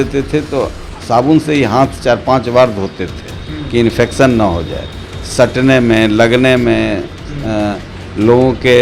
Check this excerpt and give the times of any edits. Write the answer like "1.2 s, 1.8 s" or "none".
none